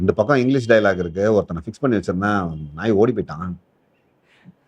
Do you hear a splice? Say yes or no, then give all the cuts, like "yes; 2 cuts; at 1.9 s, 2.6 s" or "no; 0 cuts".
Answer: no; 0 cuts